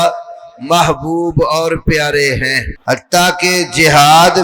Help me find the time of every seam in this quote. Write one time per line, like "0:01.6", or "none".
0:02.7